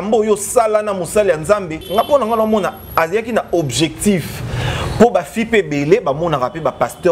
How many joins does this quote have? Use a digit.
1